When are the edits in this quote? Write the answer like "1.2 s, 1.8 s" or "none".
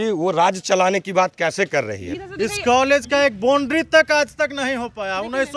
2.1 s